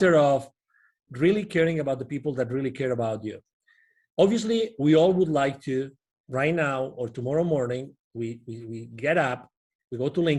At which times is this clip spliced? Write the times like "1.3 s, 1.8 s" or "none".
none